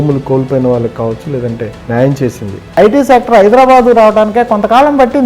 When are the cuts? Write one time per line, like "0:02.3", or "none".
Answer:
0:01.7
0:02.7